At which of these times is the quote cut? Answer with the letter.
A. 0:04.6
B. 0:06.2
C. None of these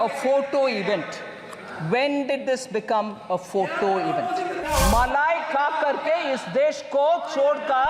A